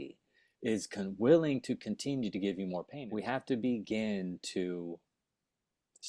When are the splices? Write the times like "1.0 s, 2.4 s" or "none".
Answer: 3.0 s

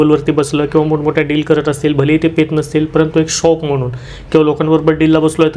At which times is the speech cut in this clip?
none

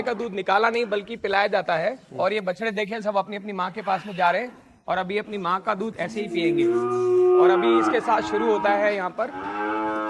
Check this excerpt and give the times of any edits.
none

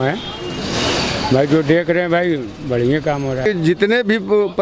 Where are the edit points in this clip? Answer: 3.5 s

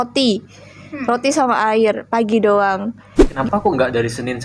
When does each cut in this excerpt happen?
3.3 s

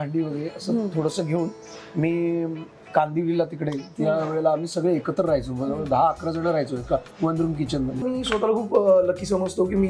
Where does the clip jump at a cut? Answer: 8.0 s

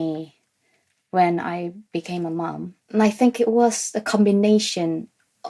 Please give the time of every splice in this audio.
2.7 s

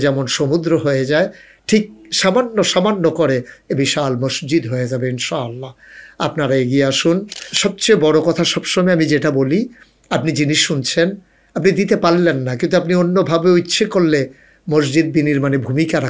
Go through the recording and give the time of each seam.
7.4 s

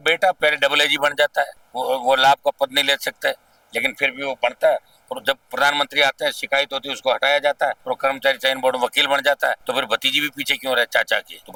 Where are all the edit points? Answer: none

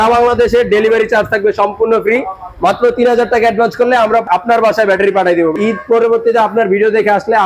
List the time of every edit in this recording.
4.2 s, 5.5 s

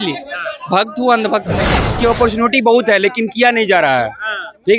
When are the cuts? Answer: 1.8 s

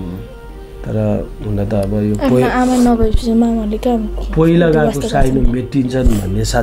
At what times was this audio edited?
none

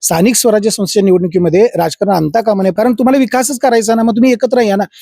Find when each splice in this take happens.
2.7 s

